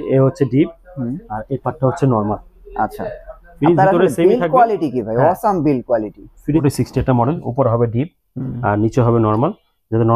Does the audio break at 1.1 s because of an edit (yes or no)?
no